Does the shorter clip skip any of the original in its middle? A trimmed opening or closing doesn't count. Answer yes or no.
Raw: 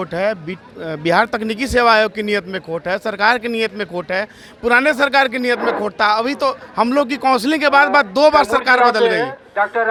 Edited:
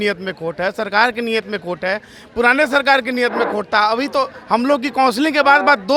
no